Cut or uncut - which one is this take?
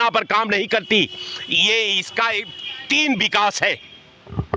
uncut